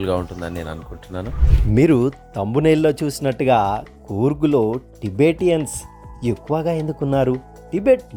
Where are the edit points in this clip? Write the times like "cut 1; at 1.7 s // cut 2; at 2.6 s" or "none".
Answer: cut 1; at 1.4 s

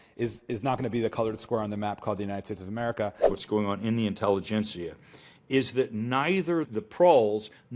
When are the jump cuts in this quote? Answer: cut 1; at 3.4 s // cut 2; at 6.7 s

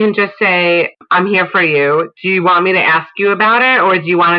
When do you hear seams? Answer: cut 1; at 0.9 s

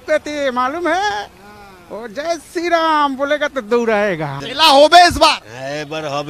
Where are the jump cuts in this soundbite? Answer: cut 1; at 4.4 s

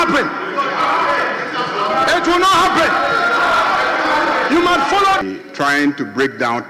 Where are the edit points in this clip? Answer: cut 1; at 5.2 s

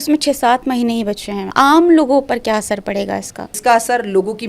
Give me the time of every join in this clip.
cut 1; at 1.5 s // cut 2; at 3.5 s

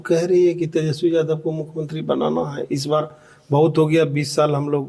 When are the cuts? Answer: none

